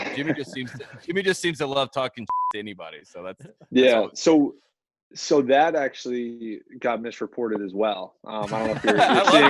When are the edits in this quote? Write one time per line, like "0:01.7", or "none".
none